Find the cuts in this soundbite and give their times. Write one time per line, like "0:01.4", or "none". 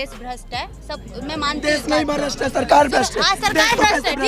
none